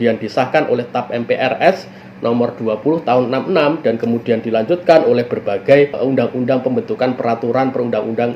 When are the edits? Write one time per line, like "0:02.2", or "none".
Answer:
0:06.0